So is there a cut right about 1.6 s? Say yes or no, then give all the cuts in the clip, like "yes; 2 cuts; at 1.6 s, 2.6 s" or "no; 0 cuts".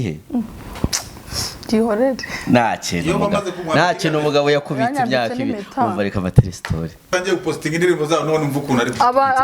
no; 1 cut; at 7.1 s